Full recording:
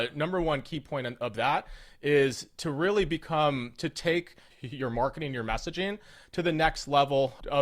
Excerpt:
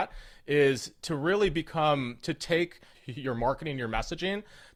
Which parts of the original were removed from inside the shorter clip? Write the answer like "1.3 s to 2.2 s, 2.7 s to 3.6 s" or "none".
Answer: none